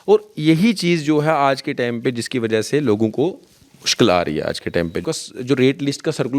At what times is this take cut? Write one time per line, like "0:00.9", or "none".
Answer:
0:05.0

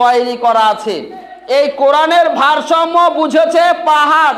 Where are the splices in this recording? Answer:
0:01.4

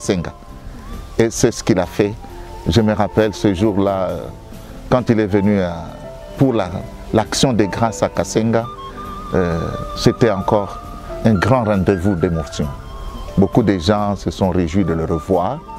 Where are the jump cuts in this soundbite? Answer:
none

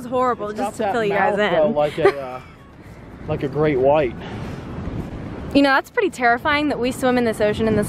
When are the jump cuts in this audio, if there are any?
none

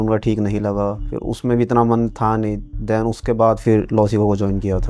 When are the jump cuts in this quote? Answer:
0:01.1

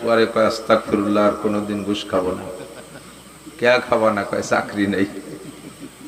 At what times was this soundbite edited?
none

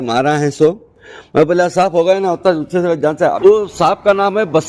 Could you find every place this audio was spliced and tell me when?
0:03.4

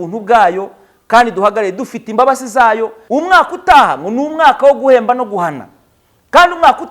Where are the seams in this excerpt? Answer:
0:03.0

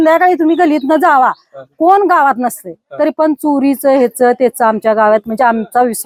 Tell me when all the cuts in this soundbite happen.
none

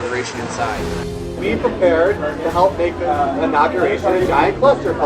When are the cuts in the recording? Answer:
0:01.1

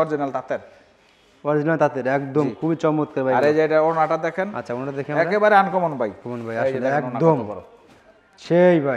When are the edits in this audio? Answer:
0:06.3

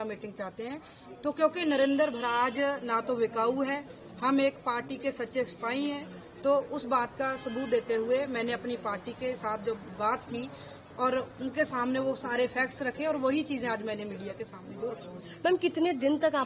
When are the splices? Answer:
none

